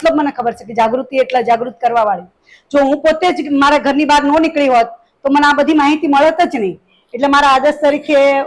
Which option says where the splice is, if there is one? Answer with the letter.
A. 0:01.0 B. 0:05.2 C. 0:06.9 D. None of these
D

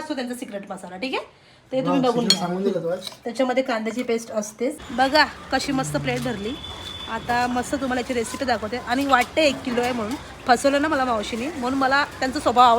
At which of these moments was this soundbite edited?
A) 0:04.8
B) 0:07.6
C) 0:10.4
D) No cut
A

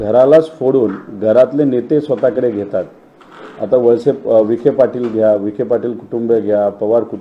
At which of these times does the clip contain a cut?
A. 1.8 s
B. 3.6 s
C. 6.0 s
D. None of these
D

